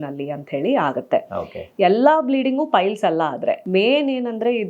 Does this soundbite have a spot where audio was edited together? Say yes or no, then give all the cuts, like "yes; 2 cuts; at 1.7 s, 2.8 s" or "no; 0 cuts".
yes; 1 cut; at 3.6 s